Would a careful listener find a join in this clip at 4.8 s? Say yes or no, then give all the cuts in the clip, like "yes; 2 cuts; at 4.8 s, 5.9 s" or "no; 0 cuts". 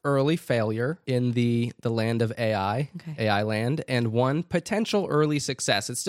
no; 1 cut; at 1.0 s